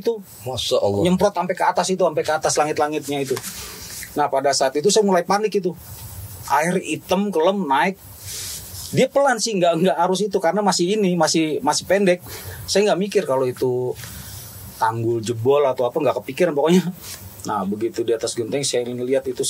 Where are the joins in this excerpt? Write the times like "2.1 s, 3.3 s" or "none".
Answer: 17.0 s